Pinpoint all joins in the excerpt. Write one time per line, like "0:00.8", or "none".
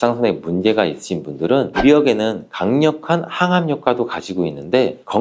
0:01.7